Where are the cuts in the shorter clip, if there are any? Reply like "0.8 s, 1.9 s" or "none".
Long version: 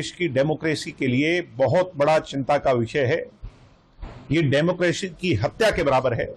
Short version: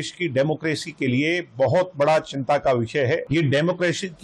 3.2 s